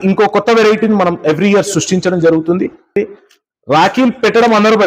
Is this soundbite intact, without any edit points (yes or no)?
no